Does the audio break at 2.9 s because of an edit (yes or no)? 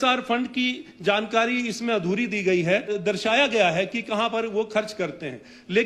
yes